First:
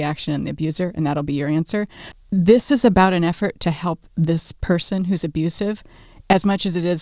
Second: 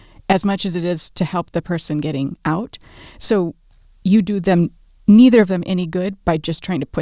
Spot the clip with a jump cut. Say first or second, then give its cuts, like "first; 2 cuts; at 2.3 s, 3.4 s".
first; 1 cut; at 2.0 s